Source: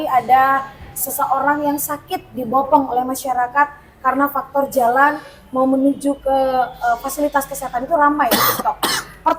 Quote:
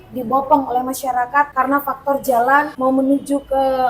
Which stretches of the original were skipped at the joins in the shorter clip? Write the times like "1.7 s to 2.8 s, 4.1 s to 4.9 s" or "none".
3.7 s to 4.0 s, 5.2 s to 5.5 s